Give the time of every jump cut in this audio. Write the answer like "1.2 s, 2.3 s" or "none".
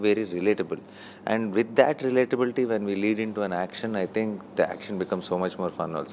none